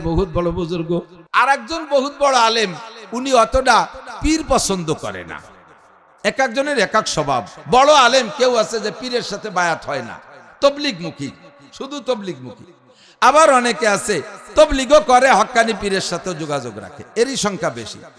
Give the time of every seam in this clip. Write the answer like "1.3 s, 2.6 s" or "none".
1.2 s